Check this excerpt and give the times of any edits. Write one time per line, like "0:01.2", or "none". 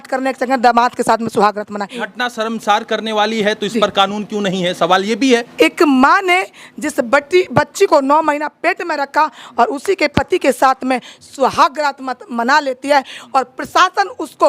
0:02.0
0:05.5